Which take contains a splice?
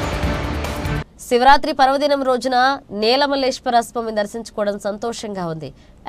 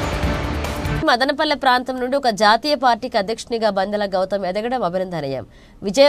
second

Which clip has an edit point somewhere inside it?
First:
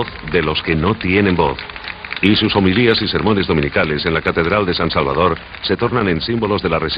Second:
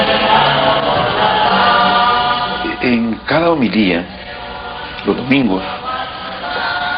first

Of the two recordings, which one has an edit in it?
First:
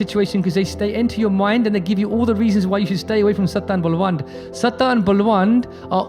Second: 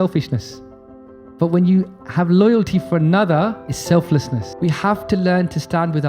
second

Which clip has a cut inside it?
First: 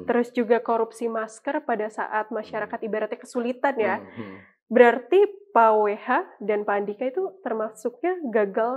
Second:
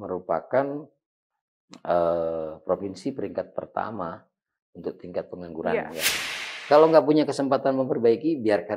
second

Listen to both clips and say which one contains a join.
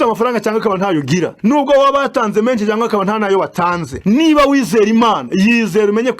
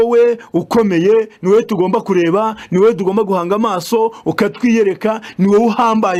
first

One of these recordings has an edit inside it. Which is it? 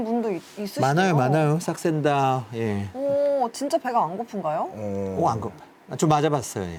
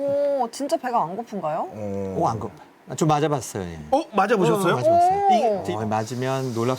second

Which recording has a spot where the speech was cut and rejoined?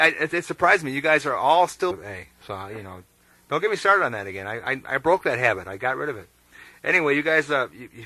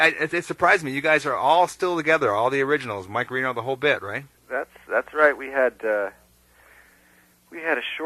second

